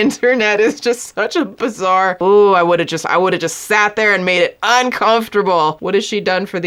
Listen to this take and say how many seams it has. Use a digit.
2